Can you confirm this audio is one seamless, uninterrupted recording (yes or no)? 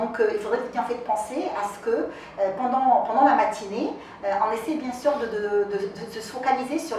yes